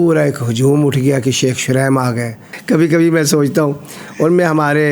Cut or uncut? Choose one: uncut